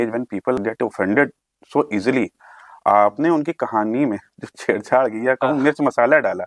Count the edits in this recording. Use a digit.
0